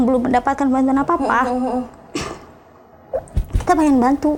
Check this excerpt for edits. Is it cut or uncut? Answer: uncut